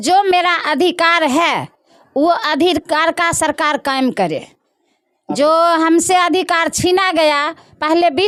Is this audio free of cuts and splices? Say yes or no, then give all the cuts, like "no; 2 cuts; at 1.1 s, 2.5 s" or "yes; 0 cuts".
yes; 0 cuts